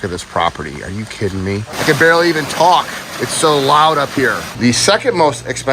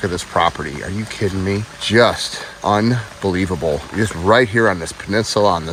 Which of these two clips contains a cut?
first; 2 cuts; at 1.7 s, 4.5 s

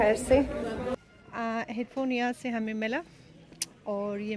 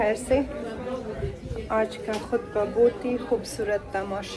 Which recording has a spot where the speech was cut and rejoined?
first; 1 cut; at 1.0 s

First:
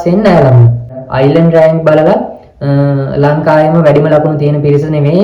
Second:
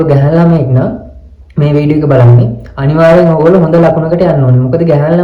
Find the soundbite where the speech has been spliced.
first; 1 cut; at 1.0 s

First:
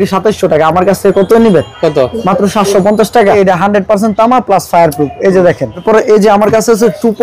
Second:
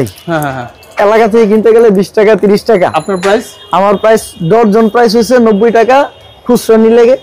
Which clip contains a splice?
first; 2 cuts; at 3.4 s, 5.8 s

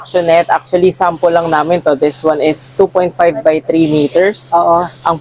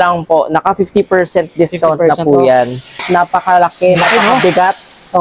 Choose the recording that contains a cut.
second; 1 cut; at 3.0 s

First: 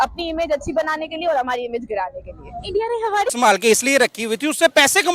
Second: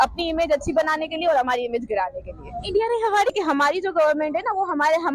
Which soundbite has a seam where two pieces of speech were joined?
first; 1 cut; at 3.3 s

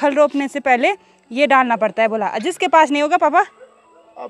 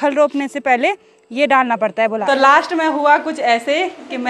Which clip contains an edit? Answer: second; 1 cut; at 2.2 s

